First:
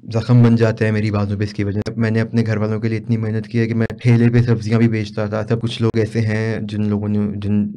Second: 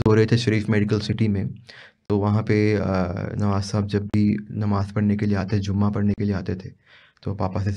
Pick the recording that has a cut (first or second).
first